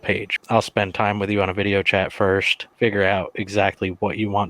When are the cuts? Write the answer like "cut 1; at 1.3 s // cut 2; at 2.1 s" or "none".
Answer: cut 1; at 2.6 s